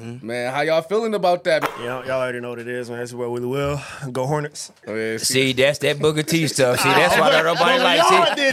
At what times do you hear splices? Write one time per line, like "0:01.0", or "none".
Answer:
0:01.7
0:04.7